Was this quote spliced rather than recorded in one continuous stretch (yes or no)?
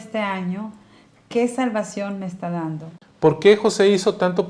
yes